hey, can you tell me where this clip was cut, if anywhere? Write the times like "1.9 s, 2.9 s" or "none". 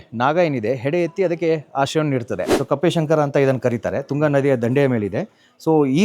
2.5 s